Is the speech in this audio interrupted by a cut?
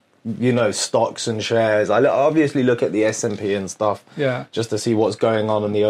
no; 0 cuts

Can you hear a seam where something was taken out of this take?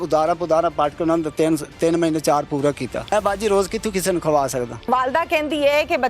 yes; 2 cuts; at 3.1 s, 4.8 s

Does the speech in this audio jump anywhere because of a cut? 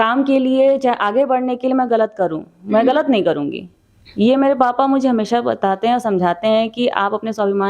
no; 0 cuts

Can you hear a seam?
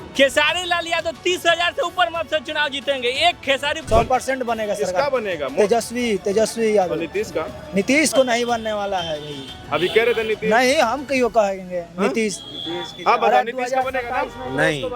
yes; 1 cut; at 3.8 s

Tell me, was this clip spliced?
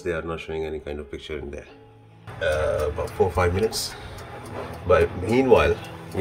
yes; 1 cut; at 2.3 s

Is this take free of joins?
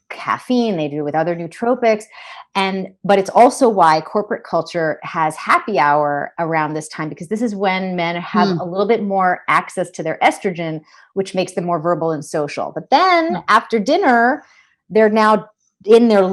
yes; 0 cuts

